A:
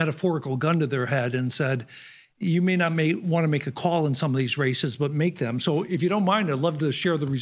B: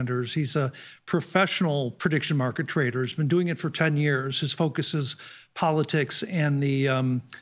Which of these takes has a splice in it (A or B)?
B